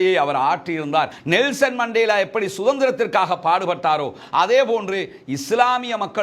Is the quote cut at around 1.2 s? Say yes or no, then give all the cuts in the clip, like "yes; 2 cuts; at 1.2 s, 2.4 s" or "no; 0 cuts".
yes; 1 cut; at 1.2 s